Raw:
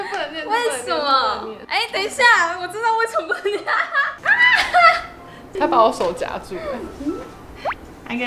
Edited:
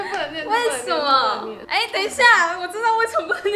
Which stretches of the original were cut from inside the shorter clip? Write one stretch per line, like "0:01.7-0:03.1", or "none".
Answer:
none